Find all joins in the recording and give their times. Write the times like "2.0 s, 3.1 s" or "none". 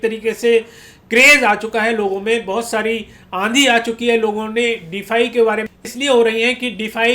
5.7 s